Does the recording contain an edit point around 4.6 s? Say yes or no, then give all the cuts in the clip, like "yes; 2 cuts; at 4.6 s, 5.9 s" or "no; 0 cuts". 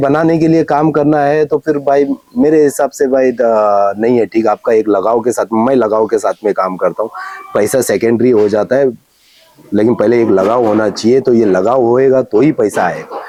no; 0 cuts